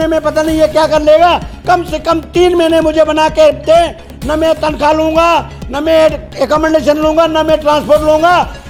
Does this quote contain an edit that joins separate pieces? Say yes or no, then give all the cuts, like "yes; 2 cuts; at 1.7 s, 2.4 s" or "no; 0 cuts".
no; 0 cuts